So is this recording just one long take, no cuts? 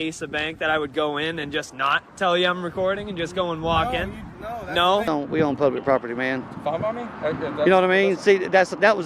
no; 1 cut; at 5.1 s

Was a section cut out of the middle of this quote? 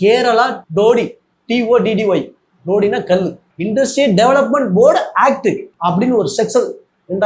no; 0 cuts

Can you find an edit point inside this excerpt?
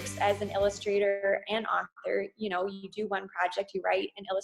no; 0 cuts

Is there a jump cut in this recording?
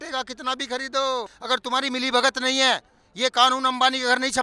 yes; 1 cut; at 1.3 s

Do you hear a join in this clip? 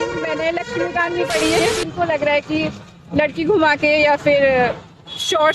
yes; 1 cut; at 1.8 s

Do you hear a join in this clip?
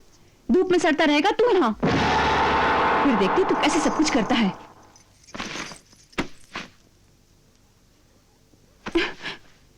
no; 0 cuts

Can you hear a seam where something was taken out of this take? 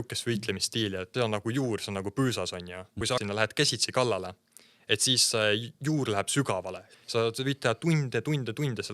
yes; 3 cuts; at 1.1 s, 3.2 s, 6.8 s

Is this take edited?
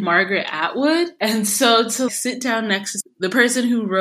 yes; 2 cuts; at 1.1 s, 3.0 s

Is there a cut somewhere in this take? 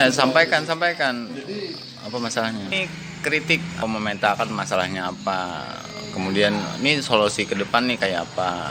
yes; 2 cuts; at 2.7 s, 3.8 s

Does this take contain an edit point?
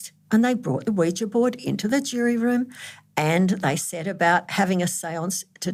no; 0 cuts

